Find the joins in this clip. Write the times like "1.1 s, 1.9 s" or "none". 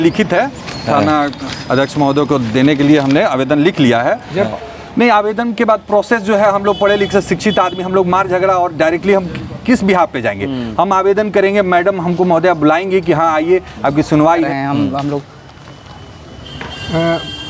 4.5 s, 14.5 s